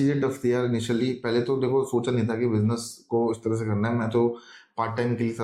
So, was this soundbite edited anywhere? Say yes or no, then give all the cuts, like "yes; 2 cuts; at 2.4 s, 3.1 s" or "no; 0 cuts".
no; 0 cuts